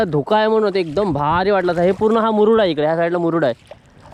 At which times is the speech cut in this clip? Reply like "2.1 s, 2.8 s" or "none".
none